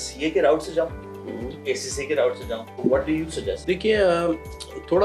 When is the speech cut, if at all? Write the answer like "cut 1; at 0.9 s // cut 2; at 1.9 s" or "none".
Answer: cut 1; at 1.6 s // cut 2; at 2.7 s // cut 3; at 3.6 s